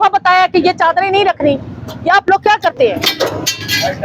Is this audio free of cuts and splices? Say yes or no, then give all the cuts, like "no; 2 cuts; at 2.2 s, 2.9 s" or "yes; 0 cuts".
yes; 0 cuts